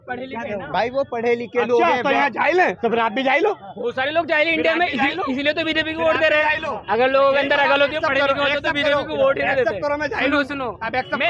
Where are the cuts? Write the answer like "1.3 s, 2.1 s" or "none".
none